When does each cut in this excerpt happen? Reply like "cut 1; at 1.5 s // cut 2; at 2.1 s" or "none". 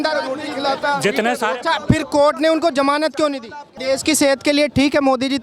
cut 1; at 3.7 s